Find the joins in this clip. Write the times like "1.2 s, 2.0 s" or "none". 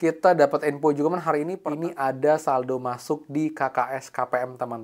1.5 s